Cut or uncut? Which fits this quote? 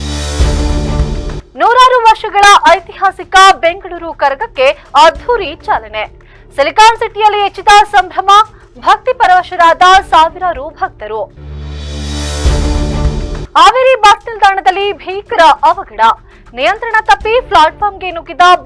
cut